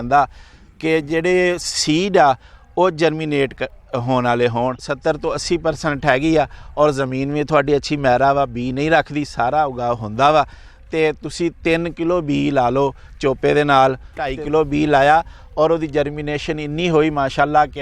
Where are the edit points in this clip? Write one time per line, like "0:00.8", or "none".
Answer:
0:04.9
0:14.4